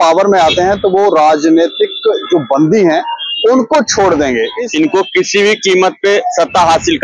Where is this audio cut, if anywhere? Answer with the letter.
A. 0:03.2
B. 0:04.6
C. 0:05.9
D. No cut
B